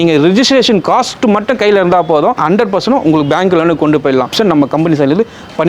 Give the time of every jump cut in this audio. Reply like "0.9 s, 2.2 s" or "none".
2.4 s, 4.3 s

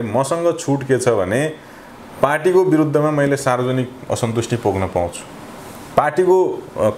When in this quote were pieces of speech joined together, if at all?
none

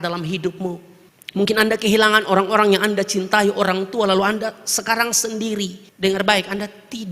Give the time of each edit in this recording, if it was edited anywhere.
5.8 s

